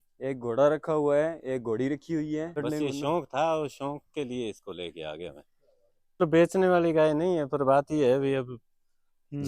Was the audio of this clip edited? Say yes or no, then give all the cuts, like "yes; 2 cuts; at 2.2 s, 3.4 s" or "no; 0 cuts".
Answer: yes; 2 cuts; at 2.6 s, 6.1 s